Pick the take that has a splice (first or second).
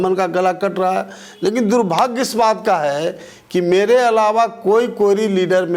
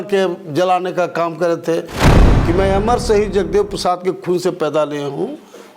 second